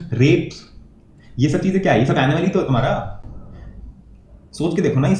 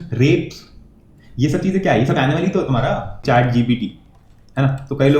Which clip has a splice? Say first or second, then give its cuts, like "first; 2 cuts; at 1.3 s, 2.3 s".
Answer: second; 1 cut; at 3.2 s